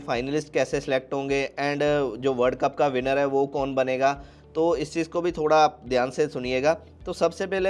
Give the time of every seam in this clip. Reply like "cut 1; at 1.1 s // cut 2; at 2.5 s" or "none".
none